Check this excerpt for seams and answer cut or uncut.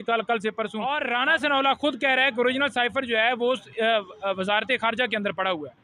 cut